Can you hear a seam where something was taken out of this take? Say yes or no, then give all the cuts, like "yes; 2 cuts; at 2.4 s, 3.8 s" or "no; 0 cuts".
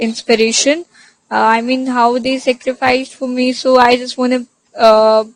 no; 0 cuts